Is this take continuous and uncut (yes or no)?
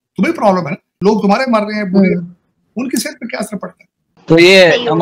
no